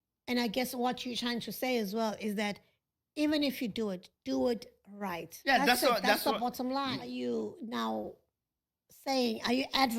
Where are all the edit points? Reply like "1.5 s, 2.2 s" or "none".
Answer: 7.1 s